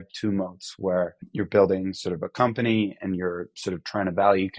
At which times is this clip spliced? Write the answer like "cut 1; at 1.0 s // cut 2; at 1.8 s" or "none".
cut 1; at 1.2 s

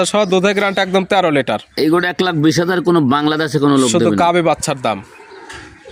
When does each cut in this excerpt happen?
none

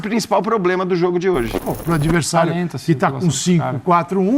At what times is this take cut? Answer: cut 1; at 1.6 s

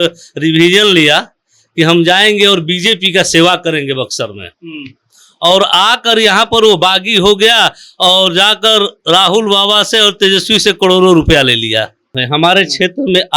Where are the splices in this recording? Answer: cut 1; at 12.2 s

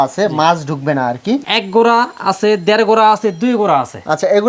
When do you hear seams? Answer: cut 1; at 1.5 s

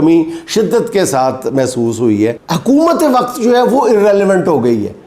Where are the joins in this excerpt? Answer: cut 1; at 2.5 s

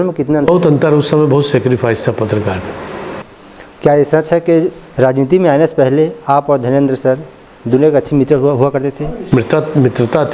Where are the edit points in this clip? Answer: cut 1; at 3.3 s // cut 2; at 8.9 s

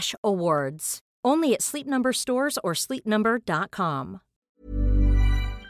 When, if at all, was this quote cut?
cut 1; at 4.5 s

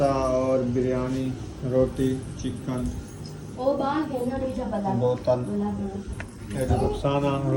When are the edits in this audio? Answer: none

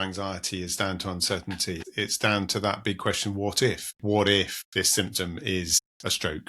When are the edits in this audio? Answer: cut 1; at 1.8 s // cut 2; at 3.9 s // cut 3; at 4.6 s

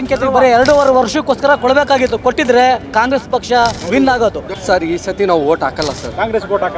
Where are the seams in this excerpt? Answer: cut 1; at 3.8 s // cut 2; at 4.5 s

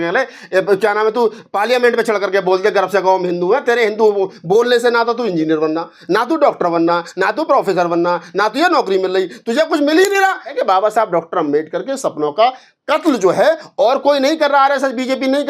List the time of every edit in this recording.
cut 1; at 10.5 s

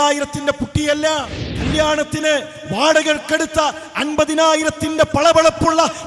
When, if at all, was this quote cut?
cut 1; at 1.4 s

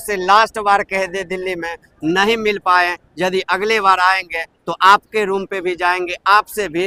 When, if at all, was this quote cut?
none

